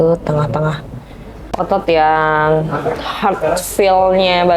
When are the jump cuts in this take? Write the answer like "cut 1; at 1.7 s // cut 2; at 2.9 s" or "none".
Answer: cut 1; at 1.5 s